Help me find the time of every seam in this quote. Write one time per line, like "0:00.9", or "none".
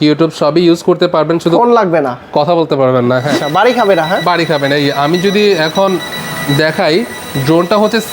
0:03.4